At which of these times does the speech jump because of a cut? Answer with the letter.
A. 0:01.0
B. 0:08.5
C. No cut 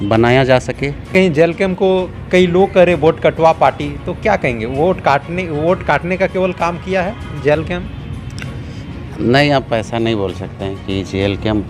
A